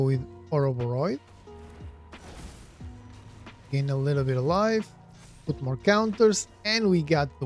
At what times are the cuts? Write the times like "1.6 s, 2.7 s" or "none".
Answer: none